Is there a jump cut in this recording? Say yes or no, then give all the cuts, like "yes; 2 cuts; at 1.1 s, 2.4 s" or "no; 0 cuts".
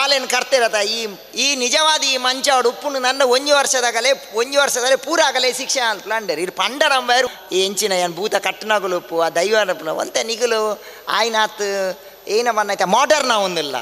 yes; 1 cut; at 7.3 s